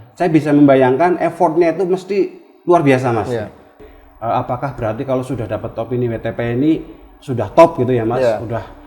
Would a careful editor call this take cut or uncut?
cut